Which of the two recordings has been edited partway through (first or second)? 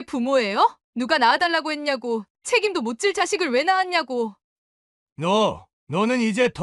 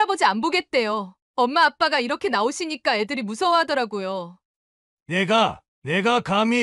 first